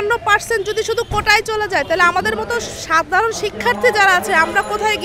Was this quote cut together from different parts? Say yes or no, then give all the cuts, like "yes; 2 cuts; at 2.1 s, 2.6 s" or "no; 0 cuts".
no; 0 cuts